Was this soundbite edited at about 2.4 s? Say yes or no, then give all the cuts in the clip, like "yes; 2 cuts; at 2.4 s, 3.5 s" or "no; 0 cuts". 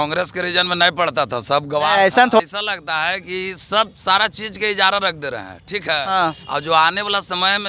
yes; 1 cut; at 2.4 s